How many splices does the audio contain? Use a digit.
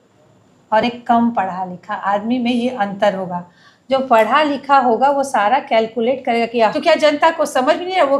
1